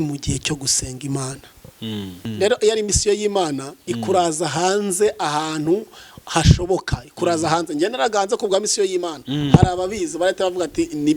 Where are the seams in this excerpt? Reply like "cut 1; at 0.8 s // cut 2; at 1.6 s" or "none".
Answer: cut 1; at 2.2 s